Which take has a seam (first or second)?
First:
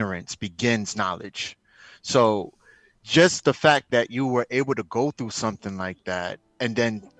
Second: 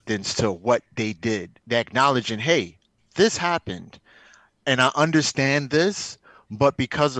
second